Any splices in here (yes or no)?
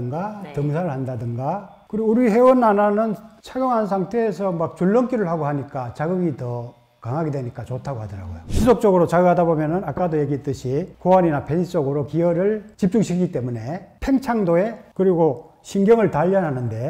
yes